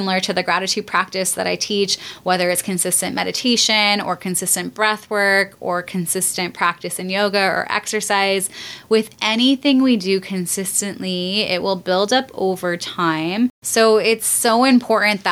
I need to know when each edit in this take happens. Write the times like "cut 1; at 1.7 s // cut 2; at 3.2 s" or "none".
none

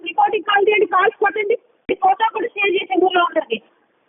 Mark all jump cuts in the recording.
cut 1; at 1.7 s

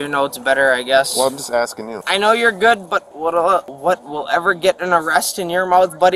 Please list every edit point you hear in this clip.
cut 1; at 2.0 s // cut 2; at 3.7 s

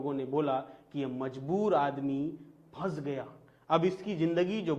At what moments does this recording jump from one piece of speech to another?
none

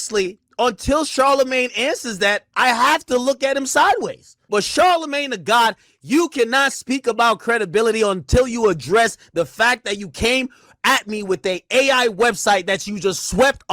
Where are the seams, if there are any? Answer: cut 1; at 4.3 s

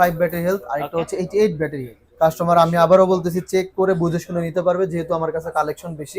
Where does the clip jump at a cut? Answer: cut 1; at 2.0 s

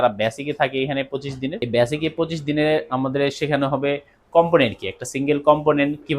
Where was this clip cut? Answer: cut 1; at 1.6 s

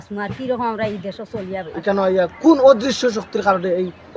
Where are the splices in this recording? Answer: cut 1; at 1.8 s

